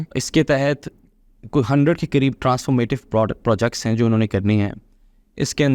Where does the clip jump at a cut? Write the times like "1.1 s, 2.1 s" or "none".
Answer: none